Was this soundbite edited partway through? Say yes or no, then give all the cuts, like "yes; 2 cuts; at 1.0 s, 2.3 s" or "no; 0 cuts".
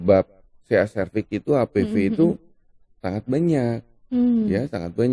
no; 0 cuts